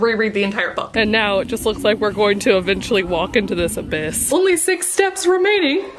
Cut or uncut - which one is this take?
cut